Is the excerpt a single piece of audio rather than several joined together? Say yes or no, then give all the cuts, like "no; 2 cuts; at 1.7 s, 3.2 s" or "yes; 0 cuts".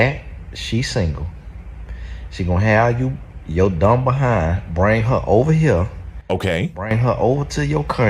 yes; 0 cuts